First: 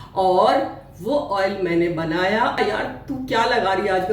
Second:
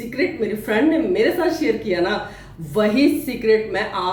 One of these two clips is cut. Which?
first; 1 cut; at 2.6 s

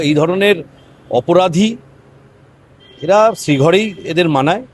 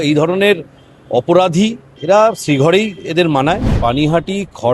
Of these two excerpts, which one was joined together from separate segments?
second; 2 cuts; at 1.9 s, 3.7 s

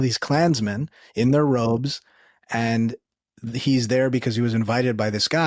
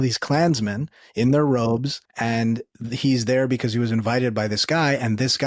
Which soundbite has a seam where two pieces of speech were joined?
second; 1 cut; at 2.4 s

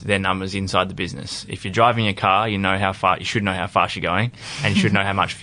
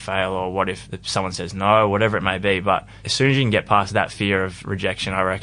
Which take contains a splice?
second; 2 cuts; at 0.9 s, 3.9 s

